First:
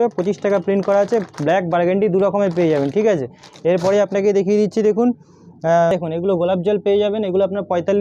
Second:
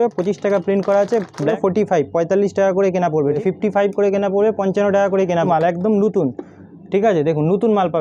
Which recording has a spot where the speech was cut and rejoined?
second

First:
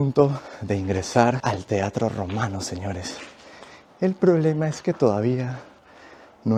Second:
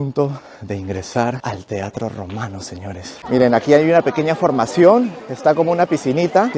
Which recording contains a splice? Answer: second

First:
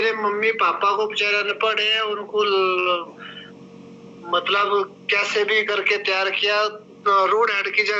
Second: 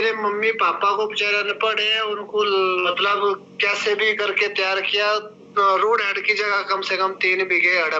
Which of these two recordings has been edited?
second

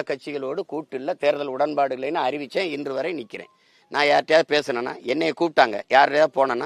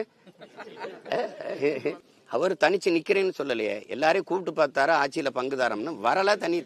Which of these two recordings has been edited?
second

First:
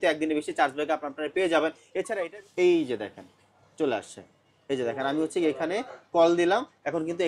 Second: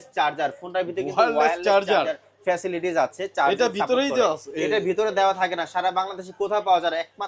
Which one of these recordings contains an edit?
first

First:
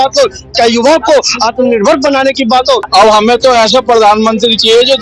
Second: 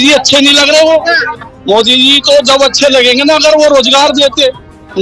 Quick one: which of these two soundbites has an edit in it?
first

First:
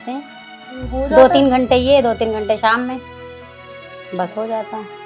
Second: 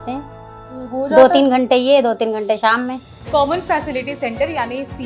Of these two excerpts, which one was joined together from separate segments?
second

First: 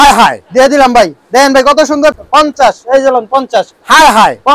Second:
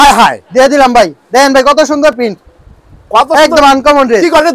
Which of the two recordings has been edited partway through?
first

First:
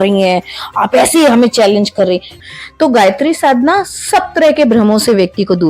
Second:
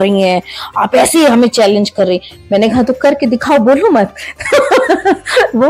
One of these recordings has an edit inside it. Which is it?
first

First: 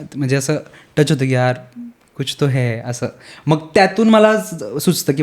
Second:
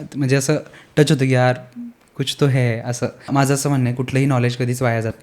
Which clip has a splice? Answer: second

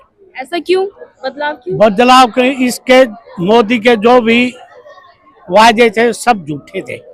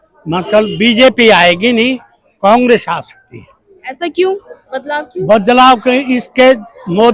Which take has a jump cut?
second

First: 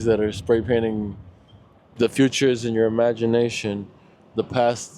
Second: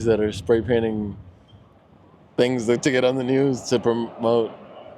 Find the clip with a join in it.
first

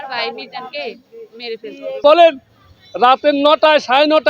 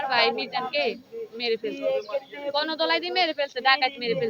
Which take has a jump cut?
first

